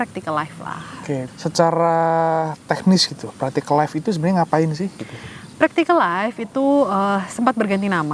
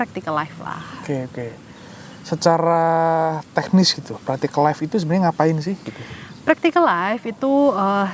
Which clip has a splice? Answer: first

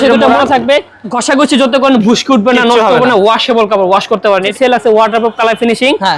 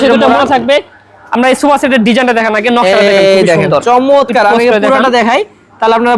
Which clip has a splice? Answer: first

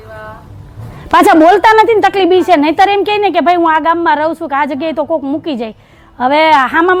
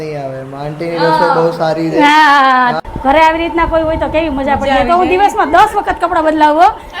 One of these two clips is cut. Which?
second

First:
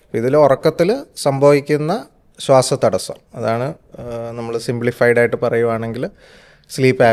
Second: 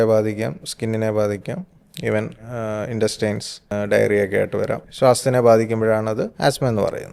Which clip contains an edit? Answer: second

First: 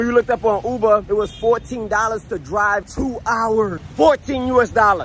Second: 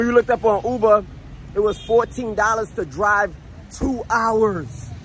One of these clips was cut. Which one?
first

